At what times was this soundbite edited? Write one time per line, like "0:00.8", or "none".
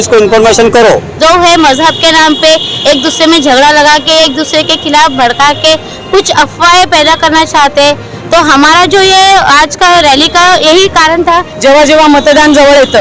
0:01.1
0:11.5